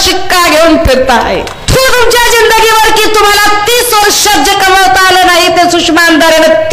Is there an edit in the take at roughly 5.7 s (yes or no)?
no